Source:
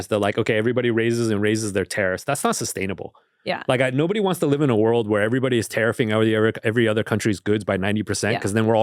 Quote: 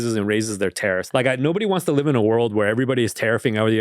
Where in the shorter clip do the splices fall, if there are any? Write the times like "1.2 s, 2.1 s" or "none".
1.1 s